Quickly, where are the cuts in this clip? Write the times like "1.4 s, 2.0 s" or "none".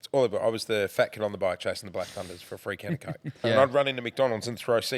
3.4 s